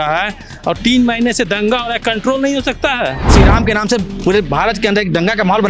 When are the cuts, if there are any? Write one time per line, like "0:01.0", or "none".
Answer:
0:03.3